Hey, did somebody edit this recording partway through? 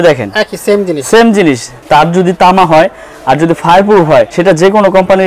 yes; 2 cuts; at 1.7 s, 4.3 s

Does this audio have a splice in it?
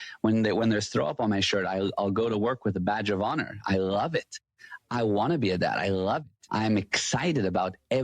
yes; 1 cut; at 6.3 s

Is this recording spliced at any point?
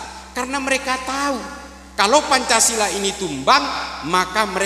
no; 0 cuts

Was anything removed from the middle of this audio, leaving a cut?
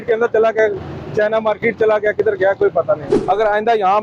yes; 1 cut; at 3.1 s

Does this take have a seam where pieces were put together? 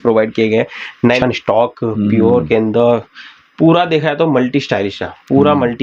yes; 1 cut; at 1.2 s

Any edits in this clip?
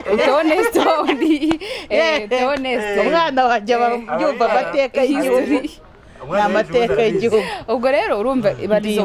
no; 0 cuts

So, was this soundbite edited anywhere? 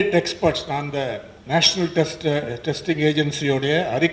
yes; 1 cut; at 1.3 s

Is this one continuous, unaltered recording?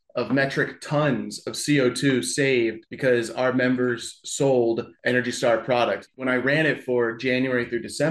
no; 3 cuts; at 2.9 s, 4.9 s, 6.1 s

